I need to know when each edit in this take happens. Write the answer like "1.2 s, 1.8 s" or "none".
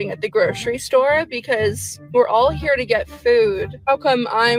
none